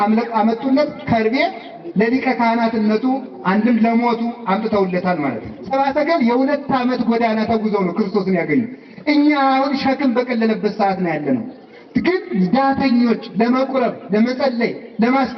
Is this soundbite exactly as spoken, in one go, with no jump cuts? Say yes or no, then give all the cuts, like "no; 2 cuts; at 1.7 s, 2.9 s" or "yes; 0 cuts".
no; 1 cut; at 5.5 s